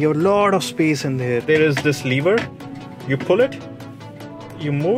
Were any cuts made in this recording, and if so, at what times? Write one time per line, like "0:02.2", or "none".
0:01.4